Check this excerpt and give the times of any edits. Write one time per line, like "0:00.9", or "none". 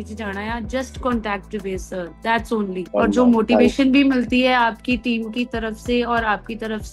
0:02.9